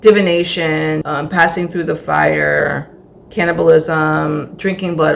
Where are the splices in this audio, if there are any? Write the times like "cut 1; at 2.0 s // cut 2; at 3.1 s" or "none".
cut 1; at 1.0 s // cut 2; at 2.6 s